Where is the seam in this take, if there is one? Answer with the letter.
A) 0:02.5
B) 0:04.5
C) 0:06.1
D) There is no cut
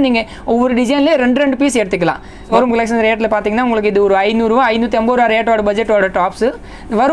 A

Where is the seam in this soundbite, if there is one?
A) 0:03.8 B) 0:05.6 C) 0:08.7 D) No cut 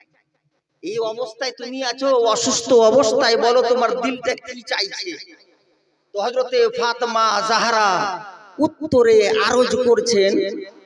D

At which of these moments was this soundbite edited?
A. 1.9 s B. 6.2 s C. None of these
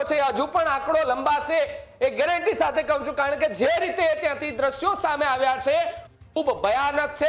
C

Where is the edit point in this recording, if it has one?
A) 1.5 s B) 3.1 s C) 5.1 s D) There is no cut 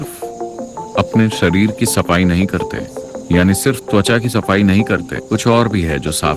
C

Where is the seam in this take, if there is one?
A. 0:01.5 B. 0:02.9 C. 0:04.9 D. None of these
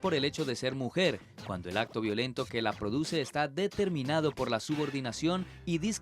B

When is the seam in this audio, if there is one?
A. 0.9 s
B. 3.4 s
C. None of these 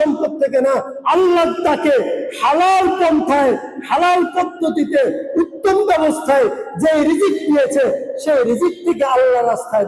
A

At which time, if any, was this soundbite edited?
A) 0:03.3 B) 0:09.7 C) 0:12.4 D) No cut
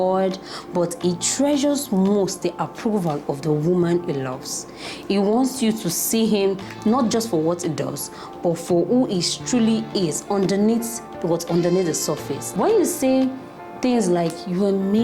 C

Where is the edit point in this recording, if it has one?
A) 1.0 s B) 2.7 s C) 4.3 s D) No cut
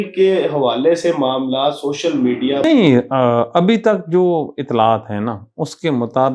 B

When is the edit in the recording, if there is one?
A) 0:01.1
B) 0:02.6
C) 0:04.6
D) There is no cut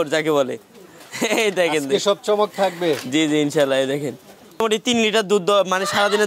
C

